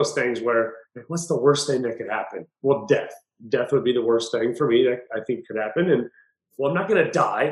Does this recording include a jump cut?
no; 0 cuts

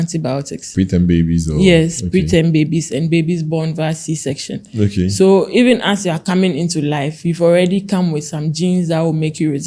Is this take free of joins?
yes; 0 cuts

